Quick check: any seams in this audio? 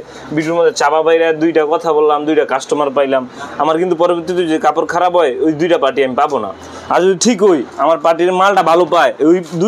no; 0 cuts

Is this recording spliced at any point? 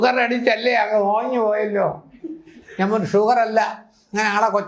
no; 0 cuts

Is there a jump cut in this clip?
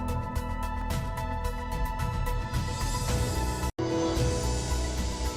no; 0 cuts

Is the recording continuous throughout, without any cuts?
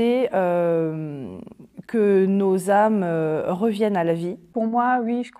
no; 1 cut; at 4.5 s

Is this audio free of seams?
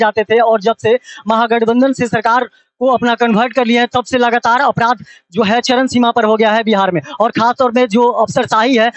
yes; 0 cuts

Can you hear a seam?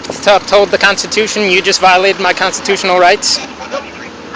no; 0 cuts

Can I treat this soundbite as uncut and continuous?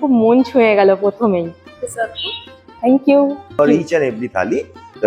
no; 2 cuts; at 1.6 s, 3.6 s

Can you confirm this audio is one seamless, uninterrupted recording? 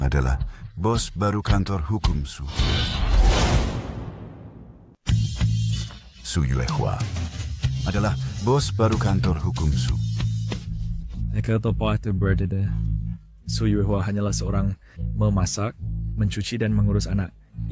yes; 0 cuts

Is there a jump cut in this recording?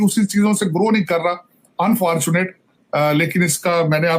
no; 0 cuts

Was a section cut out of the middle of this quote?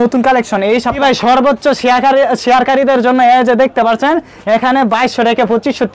yes; 1 cut; at 1.0 s

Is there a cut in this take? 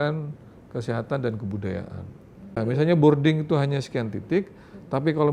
yes; 1 cut; at 2.7 s

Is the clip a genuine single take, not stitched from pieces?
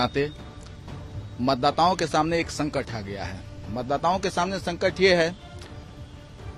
yes; 0 cuts

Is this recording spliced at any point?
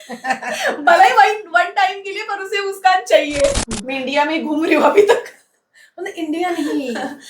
yes; 1 cut; at 3.6 s

